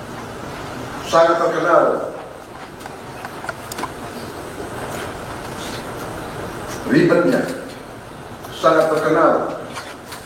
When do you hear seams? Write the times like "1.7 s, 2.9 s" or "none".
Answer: 5.0 s